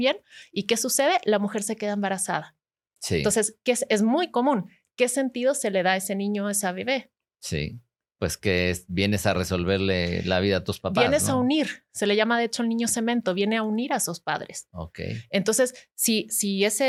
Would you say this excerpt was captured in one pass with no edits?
yes; 0 cuts

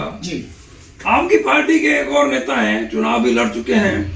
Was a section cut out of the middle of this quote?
no; 0 cuts

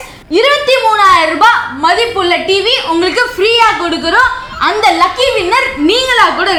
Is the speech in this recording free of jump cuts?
yes; 0 cuts

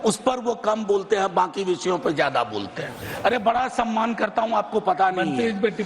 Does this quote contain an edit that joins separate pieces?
yes; 1 cut; at 3.0 s

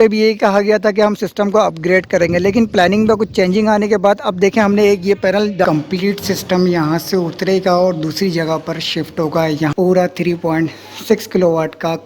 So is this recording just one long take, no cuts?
no; 2 cuts; at 5.6 s, 9.7 s

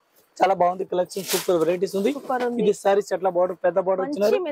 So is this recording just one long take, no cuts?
yes; 0 cuts

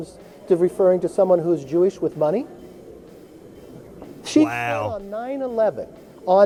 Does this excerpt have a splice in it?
no; 0 cuts

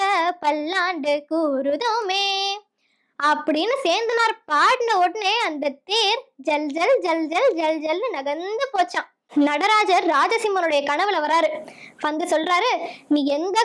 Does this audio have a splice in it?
yes; 1 cut; at 9.3 s

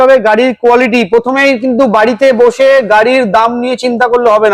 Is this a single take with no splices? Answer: yes; 0 cuts

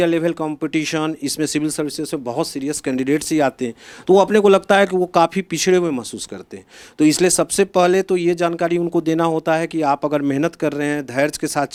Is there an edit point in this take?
no; 0 cuts

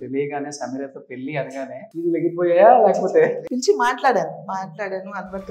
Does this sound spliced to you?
yes; 2 cuts; at 1.9 s, 3.4 s

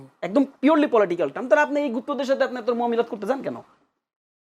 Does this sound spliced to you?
no; 0 cuts

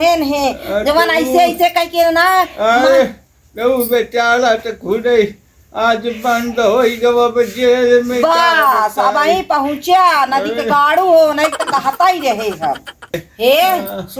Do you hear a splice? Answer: yes; 1 cut; at 13.1 s

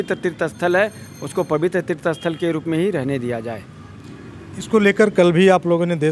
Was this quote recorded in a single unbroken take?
yes; 0 cuts

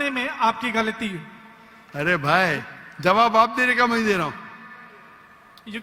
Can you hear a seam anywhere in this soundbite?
no; 0 cuts

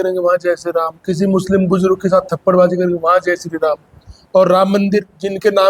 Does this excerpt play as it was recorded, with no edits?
yes; 0 cuts

